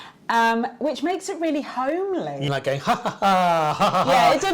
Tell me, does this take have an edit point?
yes; 1 cut; at 2.4 s

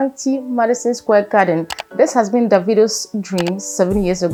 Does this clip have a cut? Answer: no; 0 cuts

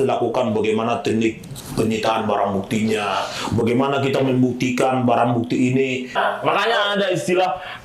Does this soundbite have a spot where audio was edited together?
yes; 1 cut; at 6.2 s

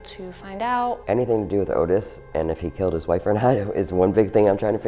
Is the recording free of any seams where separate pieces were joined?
no; 1 cut; at 1.0 s

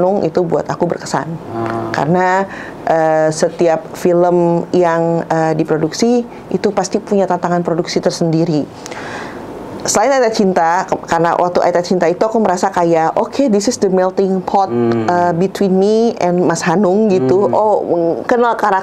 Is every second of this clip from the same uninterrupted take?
yes; 0 cuts

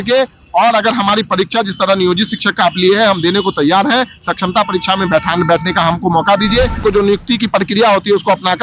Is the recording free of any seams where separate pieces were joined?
no; 1 cut; at 6.8 s

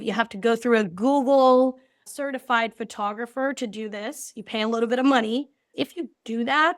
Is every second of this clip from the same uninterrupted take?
no; 2 cuts; at 2.1 s, 5.7 s

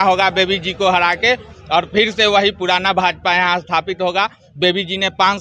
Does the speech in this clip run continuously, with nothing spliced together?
yes; 0 cuts

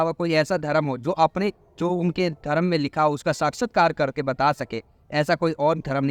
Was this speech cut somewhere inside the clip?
no; 0 cuts

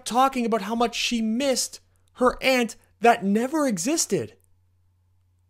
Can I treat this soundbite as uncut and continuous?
yes; 0 cuts

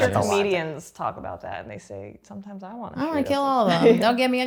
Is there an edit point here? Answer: no; 0 cuts

